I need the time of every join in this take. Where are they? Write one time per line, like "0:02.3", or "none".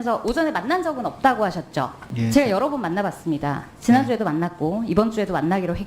0:02.0